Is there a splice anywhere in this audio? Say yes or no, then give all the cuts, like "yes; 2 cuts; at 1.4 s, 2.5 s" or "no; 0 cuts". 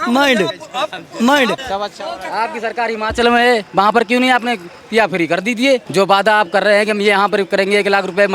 yes; 2 cuts; at 1.6 s, 5.9 s